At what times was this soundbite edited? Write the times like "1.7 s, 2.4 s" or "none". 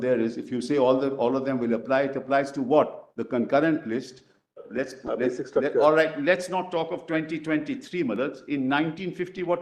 4.6 s